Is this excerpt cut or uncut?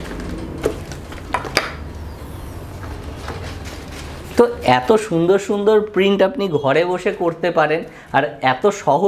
uncut